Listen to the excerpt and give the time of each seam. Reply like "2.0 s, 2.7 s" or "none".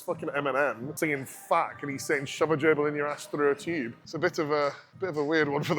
0.9 s, 4.0 s, 4.9 s